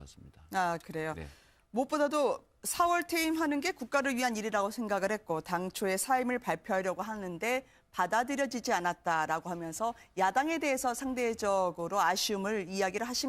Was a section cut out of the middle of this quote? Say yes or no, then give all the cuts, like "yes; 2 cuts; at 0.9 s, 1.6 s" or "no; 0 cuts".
yes; 1 cut; at 1.8 s